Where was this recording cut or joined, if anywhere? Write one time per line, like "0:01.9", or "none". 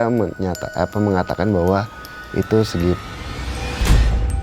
0:03.2